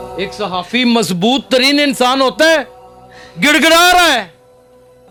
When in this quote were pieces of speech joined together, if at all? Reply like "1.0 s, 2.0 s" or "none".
none